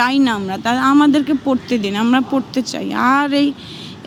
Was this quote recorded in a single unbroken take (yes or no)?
yes